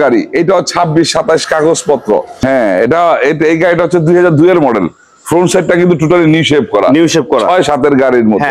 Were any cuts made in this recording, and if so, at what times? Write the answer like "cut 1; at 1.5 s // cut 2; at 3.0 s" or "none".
cut 1; at 2.4 s